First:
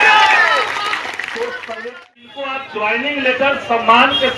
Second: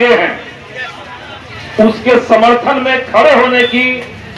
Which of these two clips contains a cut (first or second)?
first